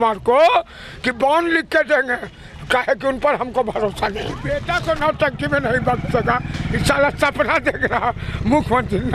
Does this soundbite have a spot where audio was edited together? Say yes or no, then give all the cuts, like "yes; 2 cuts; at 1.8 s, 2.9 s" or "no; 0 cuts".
yes; 1 cut; at 4.5 s